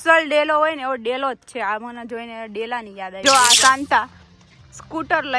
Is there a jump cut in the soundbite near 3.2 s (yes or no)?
yes